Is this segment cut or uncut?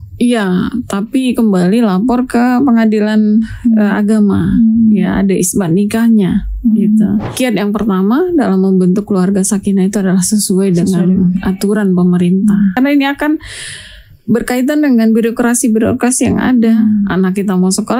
cut